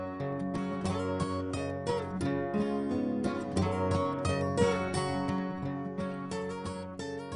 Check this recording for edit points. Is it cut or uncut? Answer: uncut